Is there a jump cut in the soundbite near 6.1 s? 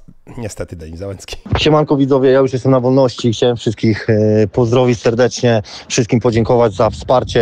no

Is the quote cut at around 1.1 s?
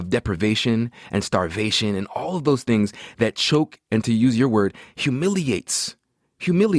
no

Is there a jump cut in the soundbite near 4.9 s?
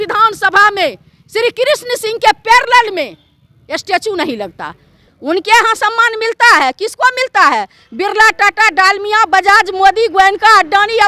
yes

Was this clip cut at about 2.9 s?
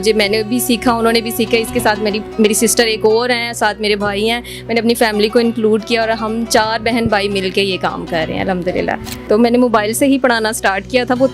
no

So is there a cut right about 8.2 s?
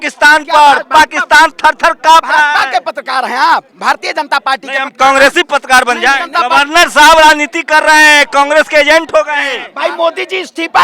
no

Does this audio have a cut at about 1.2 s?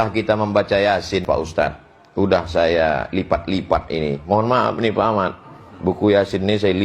yes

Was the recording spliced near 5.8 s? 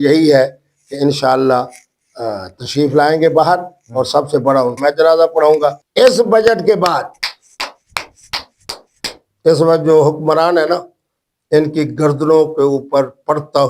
yes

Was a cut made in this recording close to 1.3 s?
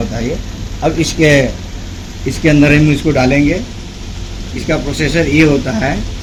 no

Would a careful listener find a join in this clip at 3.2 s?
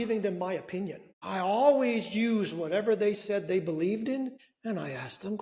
no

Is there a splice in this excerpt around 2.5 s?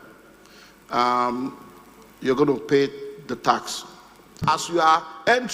no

